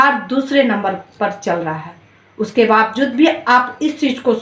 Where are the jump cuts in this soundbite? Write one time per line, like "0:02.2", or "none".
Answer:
0:02.1